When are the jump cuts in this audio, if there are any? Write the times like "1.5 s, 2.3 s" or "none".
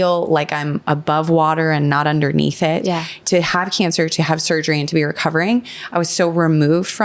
3.1 s